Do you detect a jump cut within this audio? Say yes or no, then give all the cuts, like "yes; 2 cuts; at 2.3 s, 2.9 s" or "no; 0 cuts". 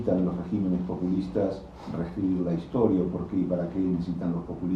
no; 0 cuts